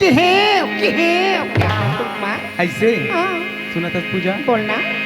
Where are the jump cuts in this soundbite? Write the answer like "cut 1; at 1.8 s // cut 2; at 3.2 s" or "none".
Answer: cut 1; at 1.8 s